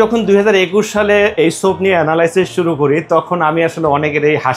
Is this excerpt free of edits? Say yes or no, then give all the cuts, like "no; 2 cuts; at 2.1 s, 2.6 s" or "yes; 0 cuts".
yes; 0 cuts